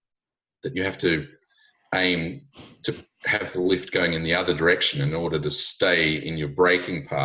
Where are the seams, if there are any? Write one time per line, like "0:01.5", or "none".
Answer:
none

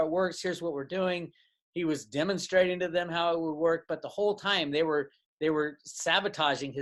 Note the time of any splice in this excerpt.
none

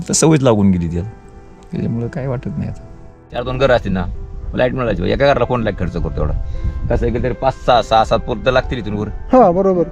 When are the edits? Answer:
0:03.4

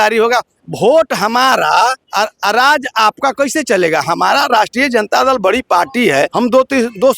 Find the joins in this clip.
0:02.0
0:06.3

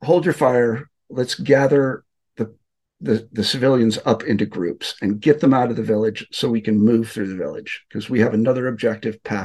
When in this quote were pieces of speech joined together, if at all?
none

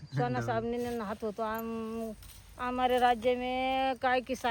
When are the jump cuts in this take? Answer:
none

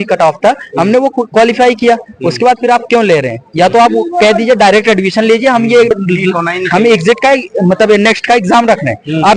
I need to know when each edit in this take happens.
0:06.0

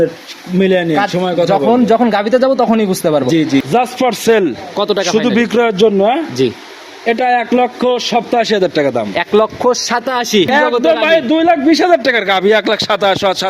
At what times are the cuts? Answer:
0:03.6
0:10.5

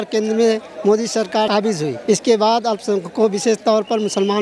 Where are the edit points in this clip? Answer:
0:01.6

